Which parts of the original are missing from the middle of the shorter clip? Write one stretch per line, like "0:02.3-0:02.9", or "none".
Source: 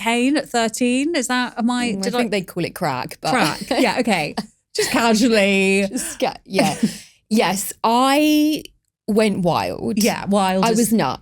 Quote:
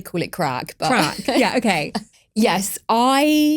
0:04.6-0:07.1